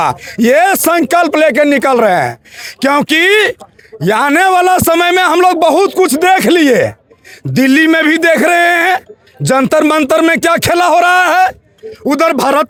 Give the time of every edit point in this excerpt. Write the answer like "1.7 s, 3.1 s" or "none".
none

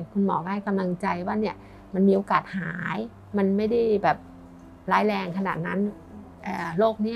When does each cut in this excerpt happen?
none

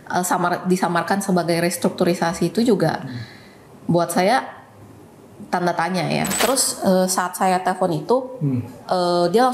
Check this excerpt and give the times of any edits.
6.3 s

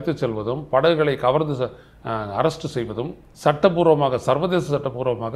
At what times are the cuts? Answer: 3.2 s

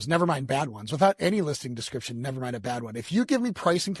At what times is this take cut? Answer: none

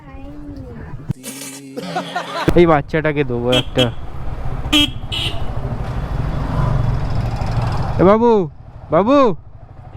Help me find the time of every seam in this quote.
2.5 s

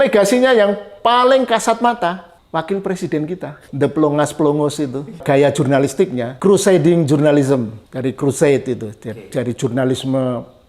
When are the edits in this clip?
2.3 s, 3.6 s, 5.2 s, 6.3 s, 7.8 s

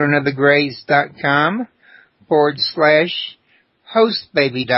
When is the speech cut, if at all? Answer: 2.7 s

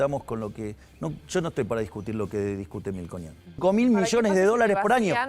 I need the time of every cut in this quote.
3.6 s

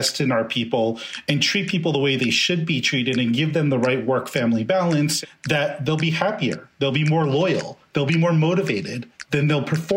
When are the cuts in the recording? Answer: 5.2 s

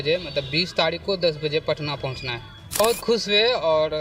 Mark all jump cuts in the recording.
2.8 s

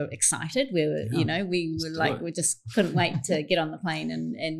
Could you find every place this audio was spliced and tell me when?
none

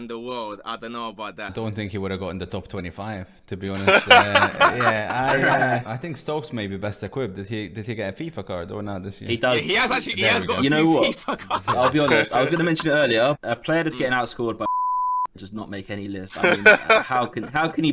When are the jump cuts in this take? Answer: 1.5 s, 5.9 s, 13.4 s

